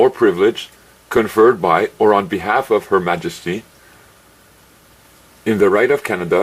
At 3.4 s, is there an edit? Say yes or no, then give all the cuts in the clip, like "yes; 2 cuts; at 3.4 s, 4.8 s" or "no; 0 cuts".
yes; 1 cut; at 3.4 s